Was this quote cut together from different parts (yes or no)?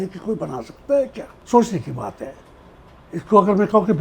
yes